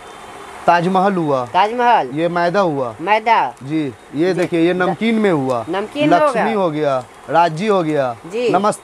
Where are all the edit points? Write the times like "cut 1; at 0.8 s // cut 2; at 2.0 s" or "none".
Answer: none